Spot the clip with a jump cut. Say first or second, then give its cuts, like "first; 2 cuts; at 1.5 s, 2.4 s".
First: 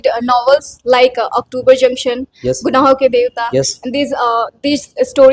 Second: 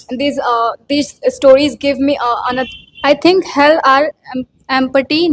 second; 1 cut; at 2.6 s